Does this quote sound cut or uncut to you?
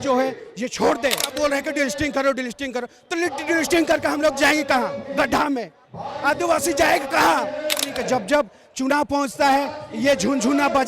cut